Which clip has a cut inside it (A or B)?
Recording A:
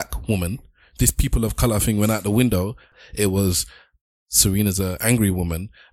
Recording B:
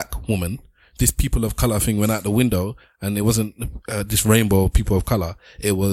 A